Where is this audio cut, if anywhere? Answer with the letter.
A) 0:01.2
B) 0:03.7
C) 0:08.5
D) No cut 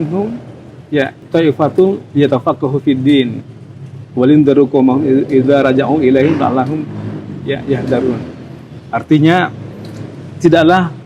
A